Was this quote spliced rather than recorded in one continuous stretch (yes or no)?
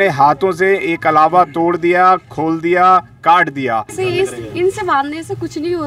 yes